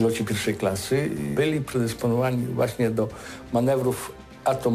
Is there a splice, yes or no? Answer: yes